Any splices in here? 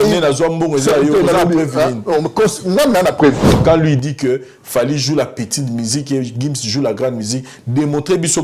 yes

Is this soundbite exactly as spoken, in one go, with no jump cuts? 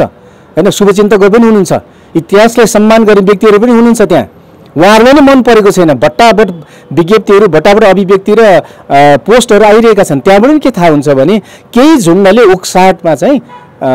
yes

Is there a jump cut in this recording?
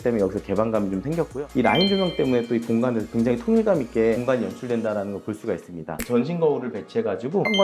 yes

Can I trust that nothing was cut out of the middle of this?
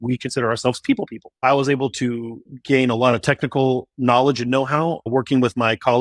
no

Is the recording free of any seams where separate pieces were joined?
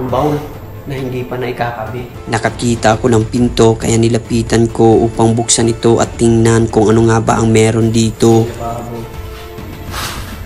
no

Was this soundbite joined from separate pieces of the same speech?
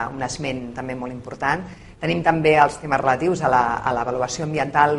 no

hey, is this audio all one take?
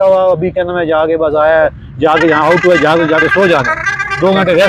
yes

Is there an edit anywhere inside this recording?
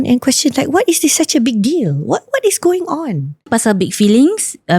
yes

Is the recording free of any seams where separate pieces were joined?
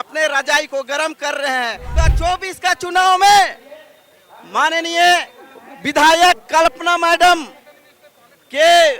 no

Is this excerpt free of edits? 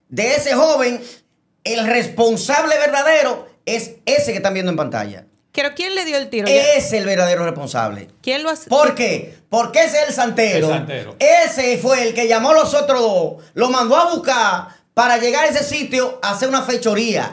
yes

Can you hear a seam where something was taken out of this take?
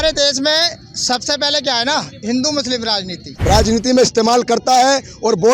yes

